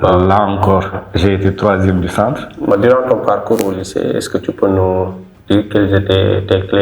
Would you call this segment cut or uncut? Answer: cut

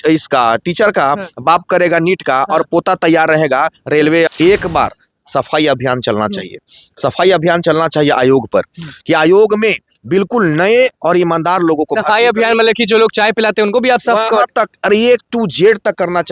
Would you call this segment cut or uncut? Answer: cut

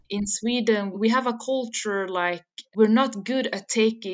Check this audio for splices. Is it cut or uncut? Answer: cut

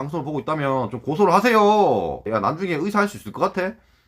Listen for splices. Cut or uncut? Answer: cut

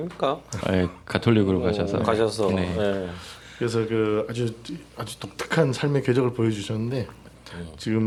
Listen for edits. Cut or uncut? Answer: uncut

